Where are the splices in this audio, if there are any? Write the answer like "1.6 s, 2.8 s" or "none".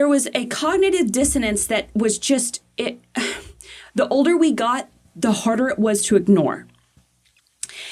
none